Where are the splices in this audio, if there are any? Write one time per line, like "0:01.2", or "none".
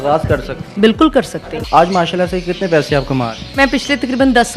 0:01.5
0:03.6